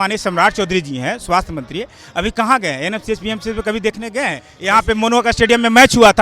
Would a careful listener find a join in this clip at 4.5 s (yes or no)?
yes